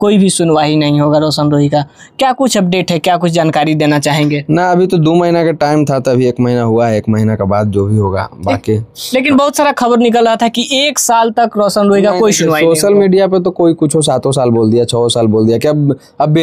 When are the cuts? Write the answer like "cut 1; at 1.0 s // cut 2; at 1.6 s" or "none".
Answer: none